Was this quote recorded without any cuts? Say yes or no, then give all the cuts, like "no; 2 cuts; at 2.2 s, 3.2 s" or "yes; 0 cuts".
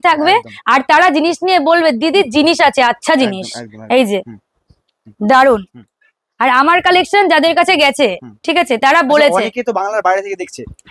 yes; 0 cuts